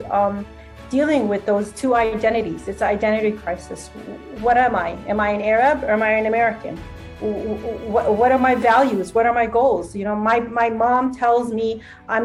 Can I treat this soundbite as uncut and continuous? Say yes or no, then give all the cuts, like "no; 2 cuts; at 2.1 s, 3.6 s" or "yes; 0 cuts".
yes; 0 cuts